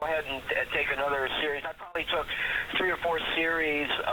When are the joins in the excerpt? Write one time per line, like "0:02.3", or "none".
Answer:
0:02.0